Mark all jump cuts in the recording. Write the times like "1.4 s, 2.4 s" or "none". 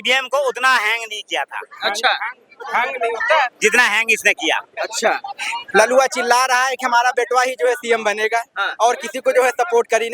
5.6 s